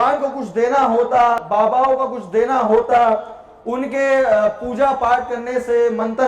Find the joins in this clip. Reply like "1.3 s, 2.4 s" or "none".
1.4 s